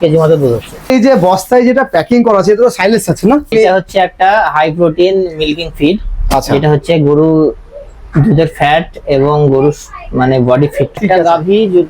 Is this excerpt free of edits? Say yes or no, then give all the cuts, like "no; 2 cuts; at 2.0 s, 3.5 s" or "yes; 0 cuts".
no; 3 cuts; at 0.9 s, 3.5 s, 11.0 s